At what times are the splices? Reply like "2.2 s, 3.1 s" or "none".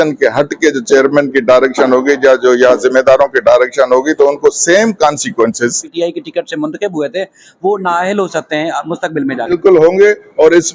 5.9 s, 9.5 s